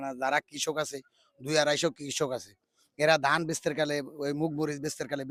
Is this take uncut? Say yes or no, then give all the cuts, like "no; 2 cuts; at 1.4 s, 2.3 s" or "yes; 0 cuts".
yes; 0 cuts